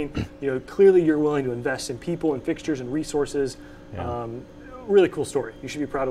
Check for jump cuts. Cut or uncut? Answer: uncut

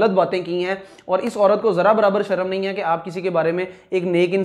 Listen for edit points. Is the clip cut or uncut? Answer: uncut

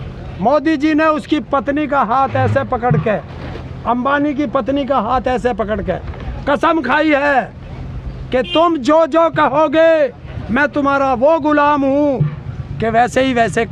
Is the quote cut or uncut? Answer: uncut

